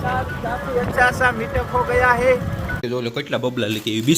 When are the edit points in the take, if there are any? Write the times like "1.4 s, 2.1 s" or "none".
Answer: 2.8 s